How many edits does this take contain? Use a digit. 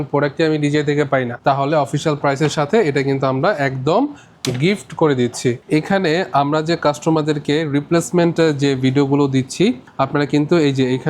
3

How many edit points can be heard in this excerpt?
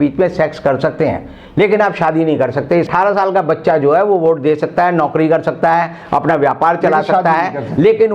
1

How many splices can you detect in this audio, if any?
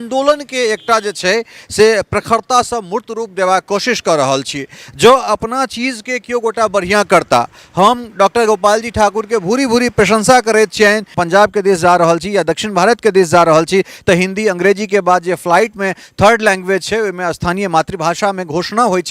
1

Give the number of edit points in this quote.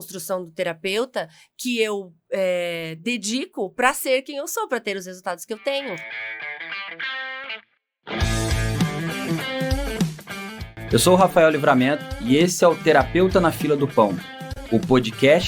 1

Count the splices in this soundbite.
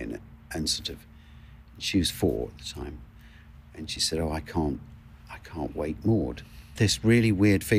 1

